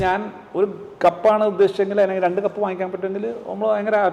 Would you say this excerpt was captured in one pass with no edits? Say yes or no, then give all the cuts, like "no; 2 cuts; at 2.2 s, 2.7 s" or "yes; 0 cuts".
yes; 0 cuts